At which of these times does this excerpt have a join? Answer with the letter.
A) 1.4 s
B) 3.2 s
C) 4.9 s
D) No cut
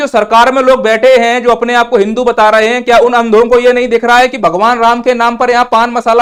D